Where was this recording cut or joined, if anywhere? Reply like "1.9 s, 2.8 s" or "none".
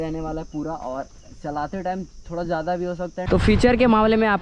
3.2 s